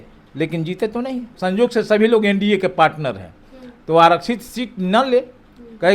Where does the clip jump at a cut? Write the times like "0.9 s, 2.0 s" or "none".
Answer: 1.3 s